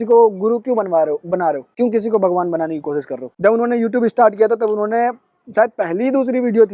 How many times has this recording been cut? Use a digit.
2